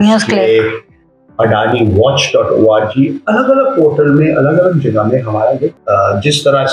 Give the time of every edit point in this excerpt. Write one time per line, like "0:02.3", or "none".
0:05.8